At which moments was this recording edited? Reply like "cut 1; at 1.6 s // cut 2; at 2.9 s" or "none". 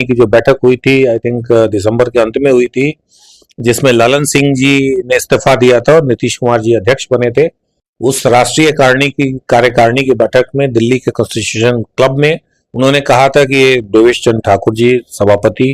none